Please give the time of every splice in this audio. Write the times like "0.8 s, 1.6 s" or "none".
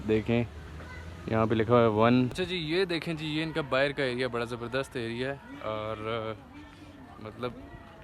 2.4 s

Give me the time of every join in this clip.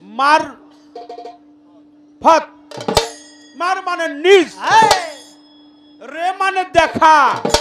none

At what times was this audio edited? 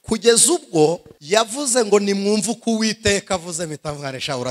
1.1 s

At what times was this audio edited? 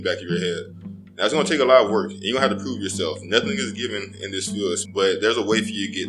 4.8 s

